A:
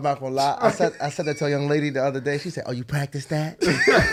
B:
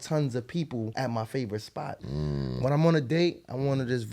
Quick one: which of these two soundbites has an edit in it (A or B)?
B